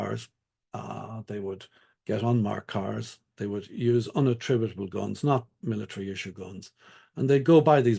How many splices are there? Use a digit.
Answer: 0